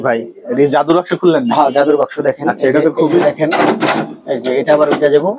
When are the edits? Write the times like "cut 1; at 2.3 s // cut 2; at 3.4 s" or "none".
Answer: none